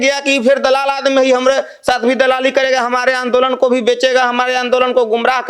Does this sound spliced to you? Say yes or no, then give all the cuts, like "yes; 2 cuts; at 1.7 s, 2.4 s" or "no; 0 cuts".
no; 0 cuts